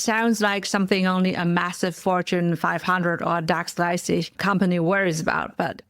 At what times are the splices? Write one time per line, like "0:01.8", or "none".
0:04.3